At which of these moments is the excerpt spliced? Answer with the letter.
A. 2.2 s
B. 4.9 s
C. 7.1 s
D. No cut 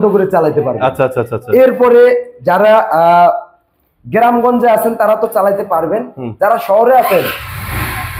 D